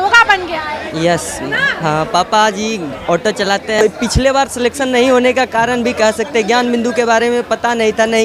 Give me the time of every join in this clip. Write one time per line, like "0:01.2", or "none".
0:03.8